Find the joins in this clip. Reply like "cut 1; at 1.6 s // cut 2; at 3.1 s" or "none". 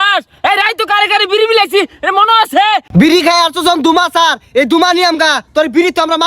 cut 1; at 2.9 s